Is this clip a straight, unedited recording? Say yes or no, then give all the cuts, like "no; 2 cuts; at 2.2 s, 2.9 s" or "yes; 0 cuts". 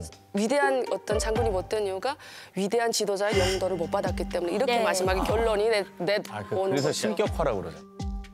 yes; 0 cuts